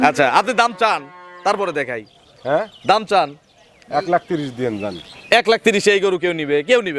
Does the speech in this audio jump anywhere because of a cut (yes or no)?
no